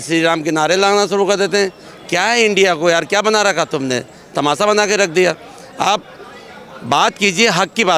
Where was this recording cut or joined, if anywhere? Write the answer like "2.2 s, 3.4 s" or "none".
none